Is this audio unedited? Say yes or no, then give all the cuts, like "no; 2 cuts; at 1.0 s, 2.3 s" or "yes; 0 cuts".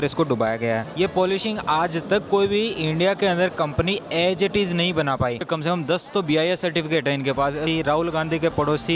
no; 3 cuts; at 0.9 s, 5.4 s, 7.7 s